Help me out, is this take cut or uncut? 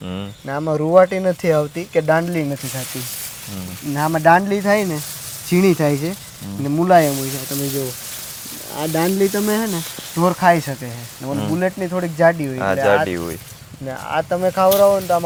uncut